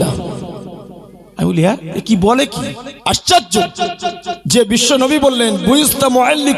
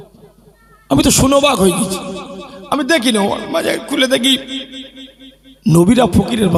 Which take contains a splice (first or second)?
first